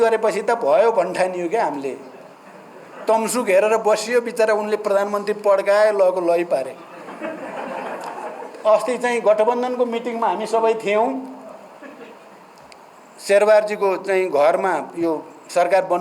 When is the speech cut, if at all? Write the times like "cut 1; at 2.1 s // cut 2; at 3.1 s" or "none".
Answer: none